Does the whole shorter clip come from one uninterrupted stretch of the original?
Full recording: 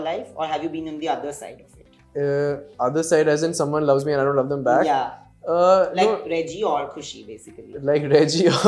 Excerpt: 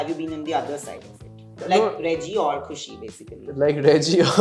no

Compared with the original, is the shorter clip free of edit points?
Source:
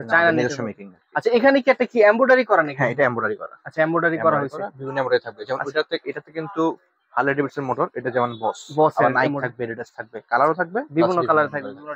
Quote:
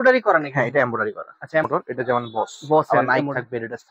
no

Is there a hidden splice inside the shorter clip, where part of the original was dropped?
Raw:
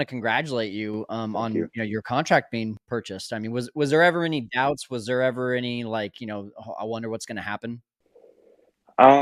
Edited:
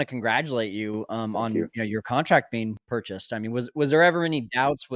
no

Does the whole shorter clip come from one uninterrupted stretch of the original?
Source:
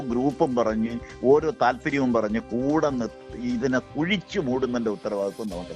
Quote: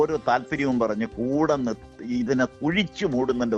yes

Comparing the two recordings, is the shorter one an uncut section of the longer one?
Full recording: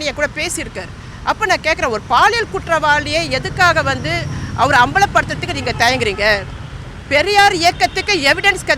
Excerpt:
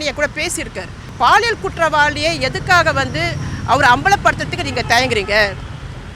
no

